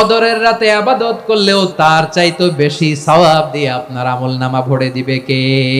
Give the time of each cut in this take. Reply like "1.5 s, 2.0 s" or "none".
1.5 s